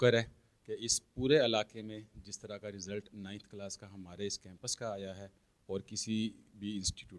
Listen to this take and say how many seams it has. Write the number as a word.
zero